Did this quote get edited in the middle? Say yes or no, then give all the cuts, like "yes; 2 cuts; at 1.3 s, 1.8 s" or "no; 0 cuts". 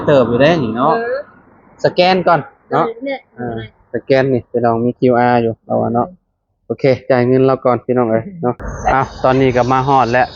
yes; 1 cut; at 8.7 s